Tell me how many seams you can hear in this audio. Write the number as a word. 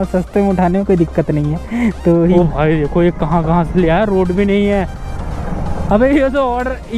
one